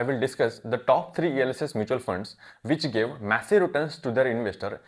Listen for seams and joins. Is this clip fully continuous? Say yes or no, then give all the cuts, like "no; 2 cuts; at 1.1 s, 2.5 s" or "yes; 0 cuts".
yes; 0 cuts